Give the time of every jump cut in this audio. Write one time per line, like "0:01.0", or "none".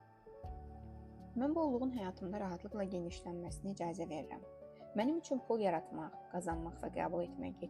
0:01.3